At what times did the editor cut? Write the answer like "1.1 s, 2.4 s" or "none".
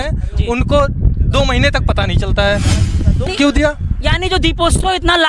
3.3 s